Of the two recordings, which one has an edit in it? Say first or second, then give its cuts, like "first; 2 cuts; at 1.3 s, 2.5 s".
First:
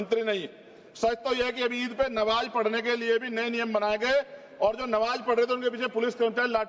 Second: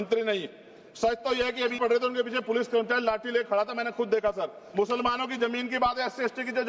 second; 2 cuts; at 1.8 s, 4.6 s